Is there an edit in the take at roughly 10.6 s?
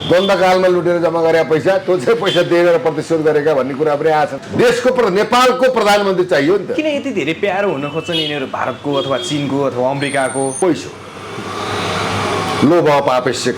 yes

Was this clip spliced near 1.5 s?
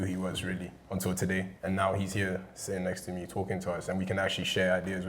yes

